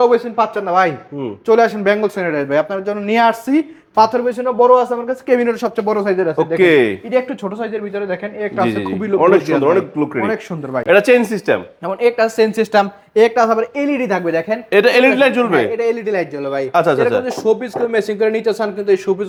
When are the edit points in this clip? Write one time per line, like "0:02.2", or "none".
none